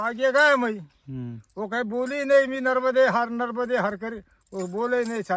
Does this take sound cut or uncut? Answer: uncut